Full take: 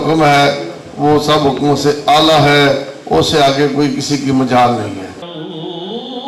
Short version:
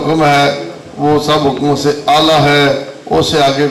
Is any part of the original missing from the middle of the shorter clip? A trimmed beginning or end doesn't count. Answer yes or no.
no